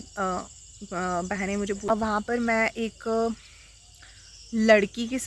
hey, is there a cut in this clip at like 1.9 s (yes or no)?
yes